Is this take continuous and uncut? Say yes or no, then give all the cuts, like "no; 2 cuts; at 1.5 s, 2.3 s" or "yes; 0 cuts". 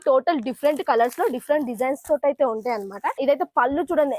no; 1 cut; at 3.2 s